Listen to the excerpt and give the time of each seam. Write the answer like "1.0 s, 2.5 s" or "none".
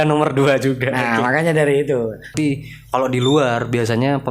2.3 s